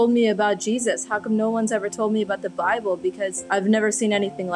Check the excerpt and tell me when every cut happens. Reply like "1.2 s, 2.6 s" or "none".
3.4 s

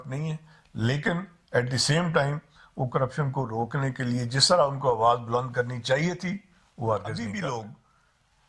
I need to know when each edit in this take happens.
7.2 s

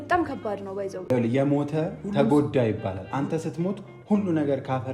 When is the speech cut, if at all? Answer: none

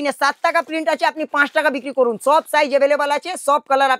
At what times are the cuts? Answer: none

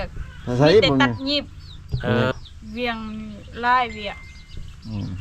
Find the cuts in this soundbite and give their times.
2.3 s

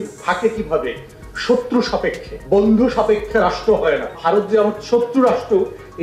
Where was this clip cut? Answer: 2.3 s, 4.1 s

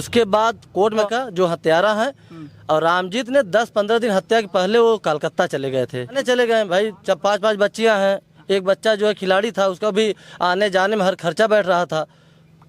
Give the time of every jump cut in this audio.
1.0 s, 6.2 s

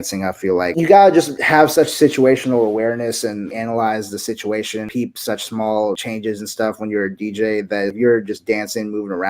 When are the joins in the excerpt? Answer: 0.7 s, 1.4 s, 3.5 s, 4.9 s, 6.0 s, 7.9 s

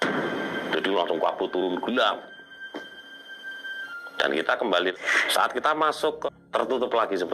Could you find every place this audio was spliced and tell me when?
4.9 s, 6.2 s

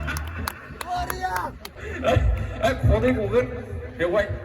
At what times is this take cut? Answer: 1.8 s

